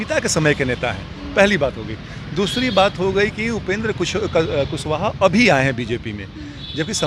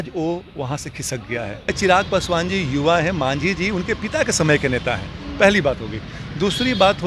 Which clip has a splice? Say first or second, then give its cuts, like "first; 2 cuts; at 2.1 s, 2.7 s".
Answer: second; 1 cut; at 1.6 s